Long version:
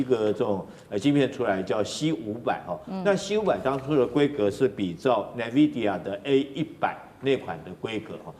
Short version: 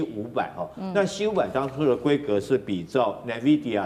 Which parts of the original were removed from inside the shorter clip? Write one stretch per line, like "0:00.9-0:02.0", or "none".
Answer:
none